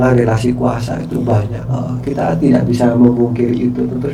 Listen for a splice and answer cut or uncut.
uncut